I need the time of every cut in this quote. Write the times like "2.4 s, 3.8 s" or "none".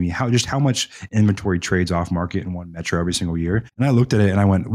3.7 s